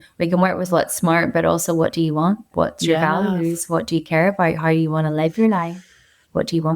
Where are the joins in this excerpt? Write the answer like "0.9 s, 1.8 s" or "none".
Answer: 2.5 s